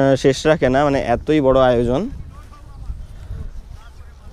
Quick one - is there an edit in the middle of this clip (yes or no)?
no